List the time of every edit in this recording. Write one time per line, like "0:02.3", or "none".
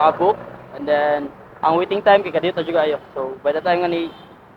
none